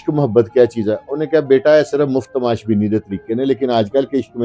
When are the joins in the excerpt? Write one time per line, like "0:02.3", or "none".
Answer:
none